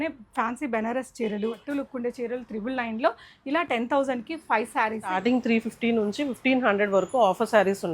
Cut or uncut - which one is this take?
cut